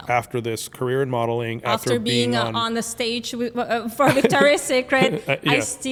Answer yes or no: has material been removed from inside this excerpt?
no